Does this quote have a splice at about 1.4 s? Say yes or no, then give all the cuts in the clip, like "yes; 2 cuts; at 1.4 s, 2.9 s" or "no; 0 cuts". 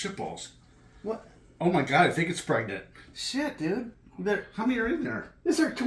no; 1 cut; at 4.0 s